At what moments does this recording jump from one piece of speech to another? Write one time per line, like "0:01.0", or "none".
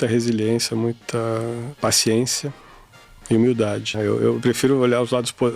0:01.7
0:03.9